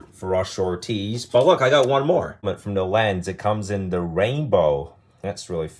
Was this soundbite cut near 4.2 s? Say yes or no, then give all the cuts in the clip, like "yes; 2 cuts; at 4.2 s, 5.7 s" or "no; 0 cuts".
no; 1 cut; at 2.4 s